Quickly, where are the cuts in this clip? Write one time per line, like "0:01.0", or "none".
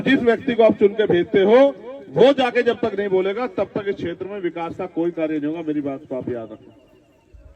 none

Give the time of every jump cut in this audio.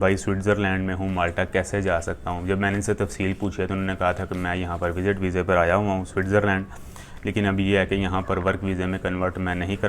none

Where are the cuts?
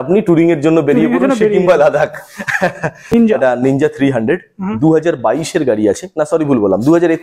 0:03.0

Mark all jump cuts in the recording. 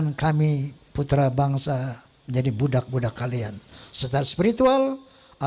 none

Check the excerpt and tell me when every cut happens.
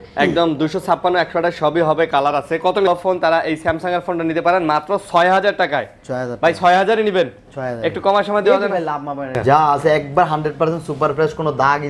0:02.9
0:09.3

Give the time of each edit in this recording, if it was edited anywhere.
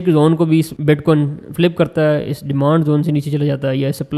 none

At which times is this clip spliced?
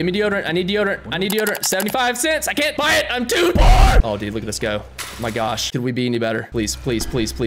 0:04.0
0:05.6
0:06.5

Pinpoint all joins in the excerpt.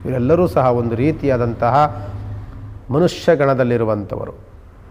none

